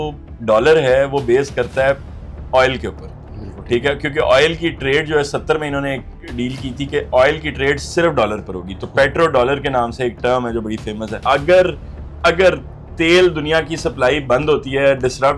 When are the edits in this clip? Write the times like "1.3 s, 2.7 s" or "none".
11.2 s